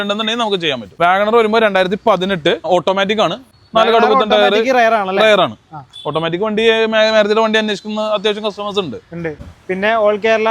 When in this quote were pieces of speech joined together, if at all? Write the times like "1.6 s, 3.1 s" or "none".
0.9 s, 3.1 s, 9.5 s